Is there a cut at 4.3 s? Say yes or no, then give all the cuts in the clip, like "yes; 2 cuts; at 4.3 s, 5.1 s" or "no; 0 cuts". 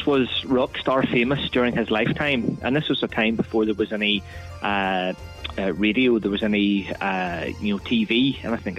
no; 0 cuts